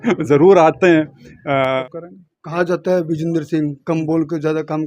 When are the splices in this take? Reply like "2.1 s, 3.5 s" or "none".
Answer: 1.8 s